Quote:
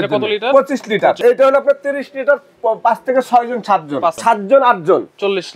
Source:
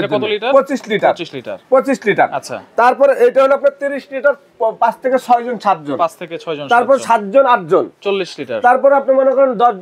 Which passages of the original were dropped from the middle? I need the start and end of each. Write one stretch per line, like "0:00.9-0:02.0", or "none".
0:01.2-0:03.2
0:06.2-0:07.0

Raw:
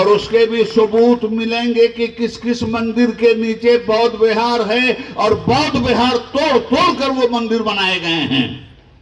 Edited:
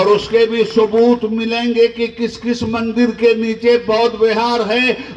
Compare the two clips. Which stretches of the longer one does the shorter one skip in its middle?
none

